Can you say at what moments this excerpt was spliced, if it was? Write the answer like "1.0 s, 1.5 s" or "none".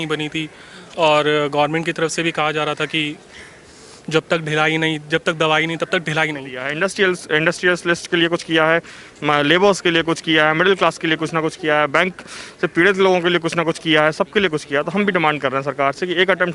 6.6 s